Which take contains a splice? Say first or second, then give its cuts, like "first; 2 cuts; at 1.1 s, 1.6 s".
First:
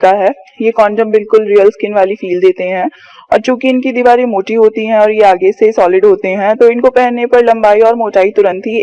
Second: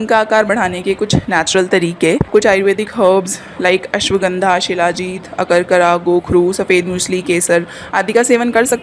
second; 1 cut; at 2.3 s